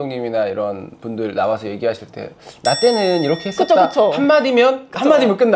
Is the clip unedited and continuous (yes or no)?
yes